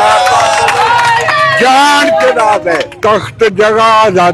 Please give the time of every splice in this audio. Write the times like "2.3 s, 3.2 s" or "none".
2.9 s